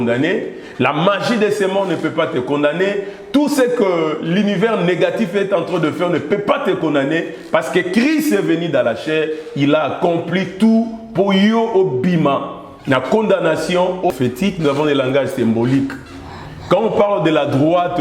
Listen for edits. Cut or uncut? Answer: cut